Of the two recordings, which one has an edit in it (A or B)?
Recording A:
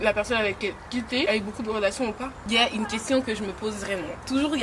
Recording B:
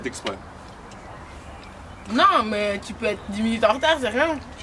A